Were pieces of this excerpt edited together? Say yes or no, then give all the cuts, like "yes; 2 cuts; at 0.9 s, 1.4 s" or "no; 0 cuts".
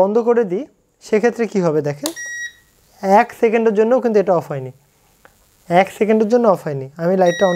no; 0 cuts